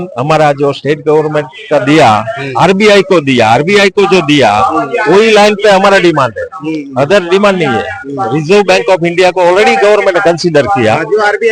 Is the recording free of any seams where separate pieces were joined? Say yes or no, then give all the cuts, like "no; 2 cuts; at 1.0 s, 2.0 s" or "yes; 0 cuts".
yes; 0 cuts